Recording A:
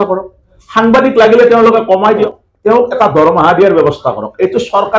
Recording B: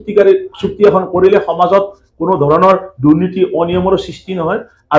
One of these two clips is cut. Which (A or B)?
A